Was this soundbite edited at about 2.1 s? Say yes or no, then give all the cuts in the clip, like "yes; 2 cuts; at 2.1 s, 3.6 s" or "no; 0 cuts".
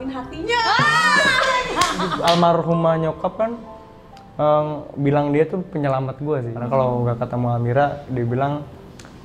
yes; 2 cuts; at 2.1 s, 6.5 s